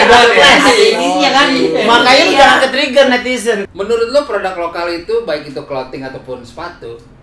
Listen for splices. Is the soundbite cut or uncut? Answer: cut